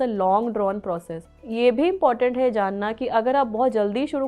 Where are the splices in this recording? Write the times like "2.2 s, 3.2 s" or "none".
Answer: 1.5 s